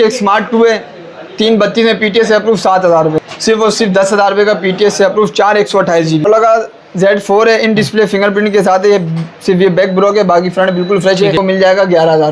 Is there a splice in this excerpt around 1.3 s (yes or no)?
no